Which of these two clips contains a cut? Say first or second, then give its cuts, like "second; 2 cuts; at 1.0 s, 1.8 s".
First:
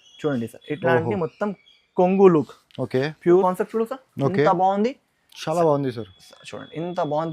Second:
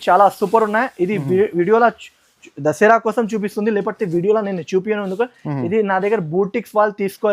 first; 1 cut; at 3.4 s